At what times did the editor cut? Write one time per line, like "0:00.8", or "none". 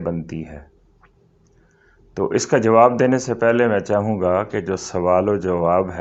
none